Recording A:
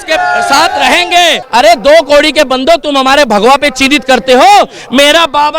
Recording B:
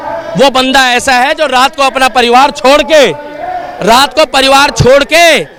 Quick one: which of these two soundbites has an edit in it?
A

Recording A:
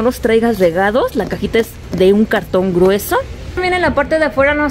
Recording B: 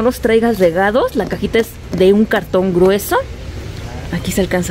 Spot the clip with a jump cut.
A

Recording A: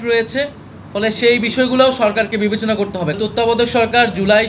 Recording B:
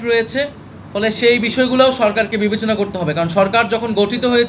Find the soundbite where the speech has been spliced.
A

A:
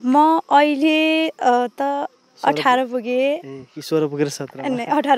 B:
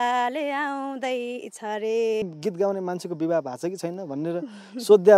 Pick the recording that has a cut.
B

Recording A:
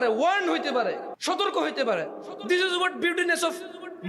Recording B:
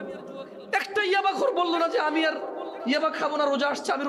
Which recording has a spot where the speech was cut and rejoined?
A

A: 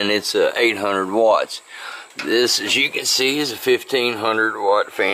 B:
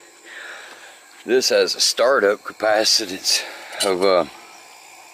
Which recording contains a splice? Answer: B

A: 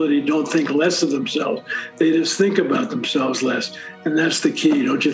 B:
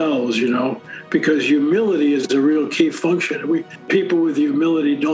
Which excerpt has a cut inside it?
B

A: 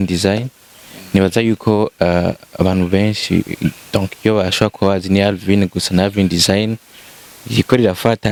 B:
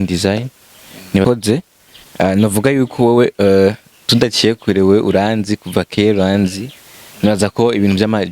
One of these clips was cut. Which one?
B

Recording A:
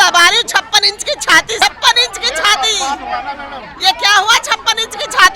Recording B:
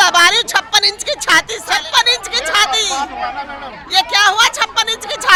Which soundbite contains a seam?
A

